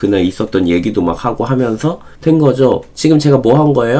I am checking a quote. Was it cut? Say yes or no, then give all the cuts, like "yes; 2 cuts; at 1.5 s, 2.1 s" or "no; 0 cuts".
no; 0 cuts